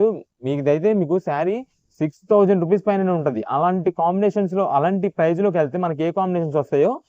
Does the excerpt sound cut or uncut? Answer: uncut